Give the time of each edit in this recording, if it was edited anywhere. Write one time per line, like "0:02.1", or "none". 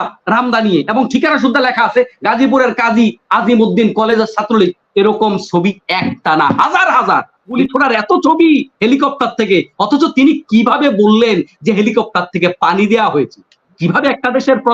0:07.6